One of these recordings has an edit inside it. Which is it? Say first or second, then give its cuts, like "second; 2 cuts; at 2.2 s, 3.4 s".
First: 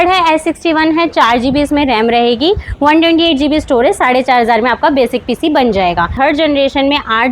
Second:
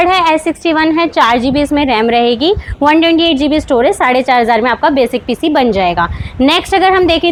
first; 1 cut; at 6.1 s